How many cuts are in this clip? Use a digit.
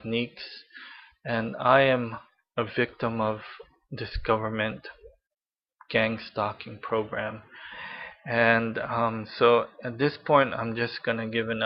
1